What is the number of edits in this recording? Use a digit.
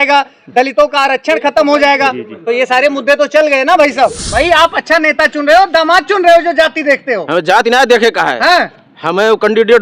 1